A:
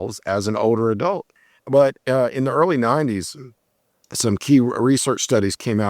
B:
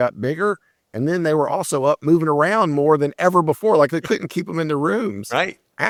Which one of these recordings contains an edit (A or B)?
A